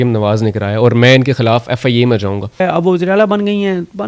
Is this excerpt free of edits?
no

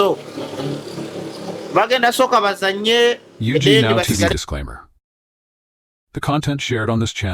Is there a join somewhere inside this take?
yes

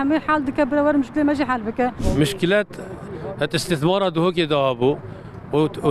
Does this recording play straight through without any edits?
no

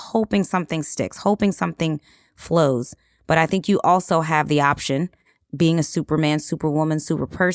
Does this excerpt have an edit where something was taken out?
no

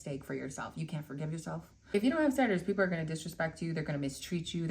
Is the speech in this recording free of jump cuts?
no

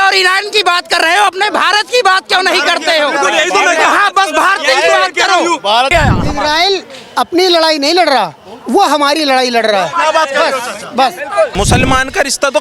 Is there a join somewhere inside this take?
yes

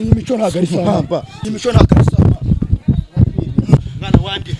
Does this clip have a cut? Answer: yes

